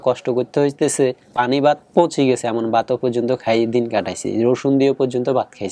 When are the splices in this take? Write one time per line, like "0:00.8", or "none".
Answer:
0:01.2